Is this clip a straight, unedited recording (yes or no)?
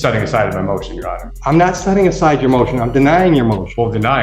no